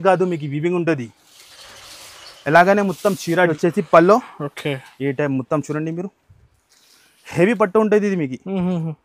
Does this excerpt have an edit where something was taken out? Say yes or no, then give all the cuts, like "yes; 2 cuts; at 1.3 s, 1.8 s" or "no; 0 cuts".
yes; 1 cut; at 3.5 s